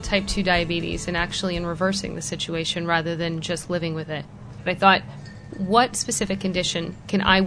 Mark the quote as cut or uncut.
cut